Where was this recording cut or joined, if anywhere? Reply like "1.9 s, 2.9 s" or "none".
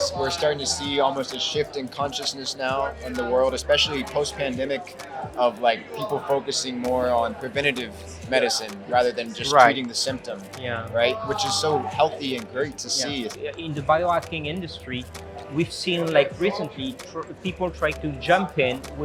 13.3 s